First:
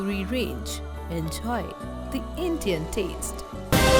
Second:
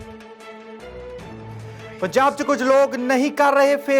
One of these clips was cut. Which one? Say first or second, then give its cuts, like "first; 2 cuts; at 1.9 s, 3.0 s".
second; 1 cut; at 1.4 s